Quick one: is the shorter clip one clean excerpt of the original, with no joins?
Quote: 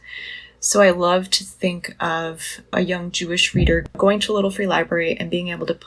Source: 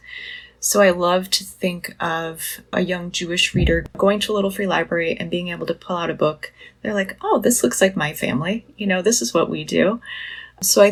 yes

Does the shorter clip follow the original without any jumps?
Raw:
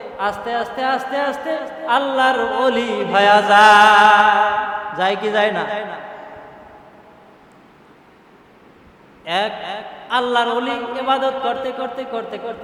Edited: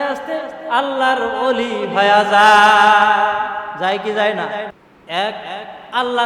no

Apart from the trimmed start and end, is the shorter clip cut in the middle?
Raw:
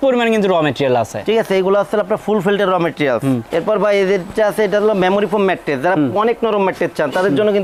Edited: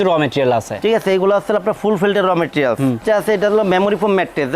yes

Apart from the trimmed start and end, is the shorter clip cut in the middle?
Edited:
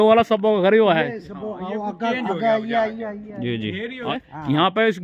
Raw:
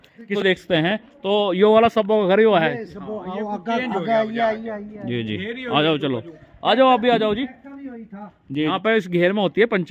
yes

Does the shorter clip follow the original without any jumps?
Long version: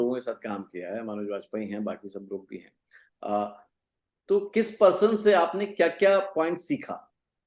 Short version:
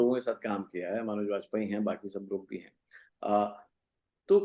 yes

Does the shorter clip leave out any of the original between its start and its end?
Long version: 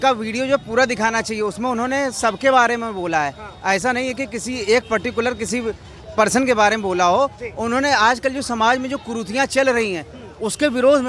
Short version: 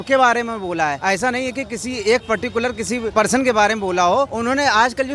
yes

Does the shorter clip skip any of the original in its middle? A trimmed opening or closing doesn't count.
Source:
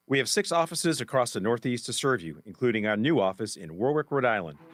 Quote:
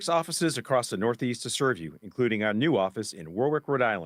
no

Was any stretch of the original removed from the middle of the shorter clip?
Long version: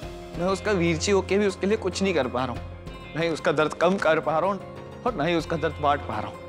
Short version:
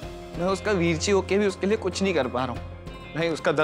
no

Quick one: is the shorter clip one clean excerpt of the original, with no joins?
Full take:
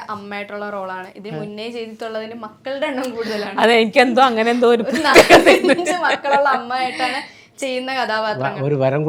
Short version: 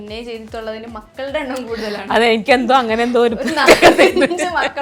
yes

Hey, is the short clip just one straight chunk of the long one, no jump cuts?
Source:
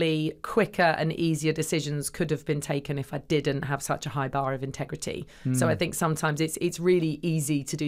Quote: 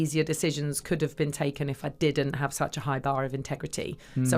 yes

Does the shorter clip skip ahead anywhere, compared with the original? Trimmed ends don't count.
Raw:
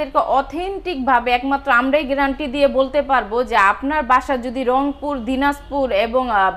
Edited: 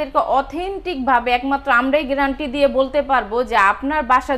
no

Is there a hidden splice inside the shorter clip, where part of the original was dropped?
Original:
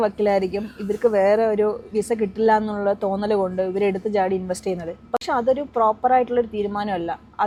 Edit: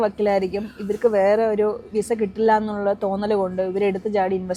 no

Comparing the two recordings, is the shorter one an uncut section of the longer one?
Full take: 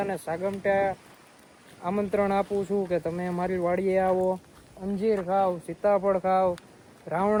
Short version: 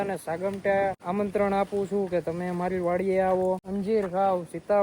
no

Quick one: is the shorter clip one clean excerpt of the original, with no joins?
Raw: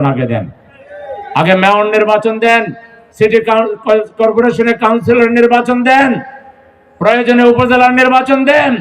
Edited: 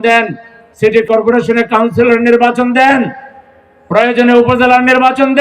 no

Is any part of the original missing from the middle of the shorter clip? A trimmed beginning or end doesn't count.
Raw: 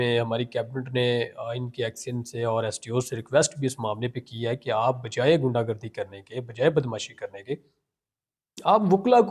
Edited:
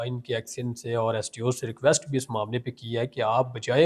no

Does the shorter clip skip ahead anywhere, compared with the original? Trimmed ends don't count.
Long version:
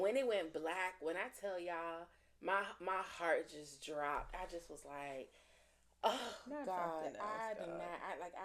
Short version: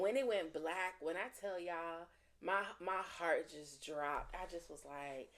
no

